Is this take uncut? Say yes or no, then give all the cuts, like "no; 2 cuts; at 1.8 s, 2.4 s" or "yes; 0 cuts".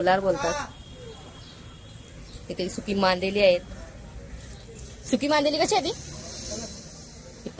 yes; 0 cuts